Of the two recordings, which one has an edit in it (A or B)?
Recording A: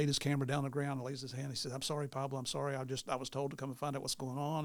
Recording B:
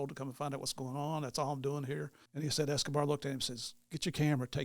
B